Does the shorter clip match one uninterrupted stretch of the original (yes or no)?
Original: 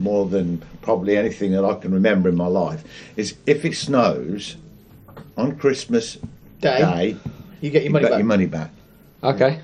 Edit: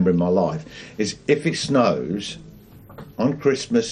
yes